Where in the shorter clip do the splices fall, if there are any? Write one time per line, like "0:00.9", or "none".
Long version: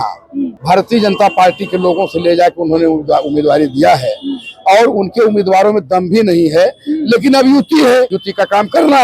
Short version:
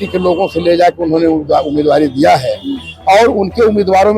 none